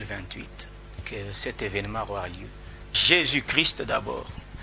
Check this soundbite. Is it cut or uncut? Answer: cut